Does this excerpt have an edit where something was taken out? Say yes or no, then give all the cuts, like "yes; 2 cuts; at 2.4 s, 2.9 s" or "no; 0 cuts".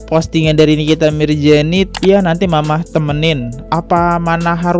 yes; 1 cut; at 1.9 s